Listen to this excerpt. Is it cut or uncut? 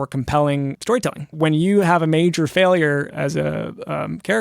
cut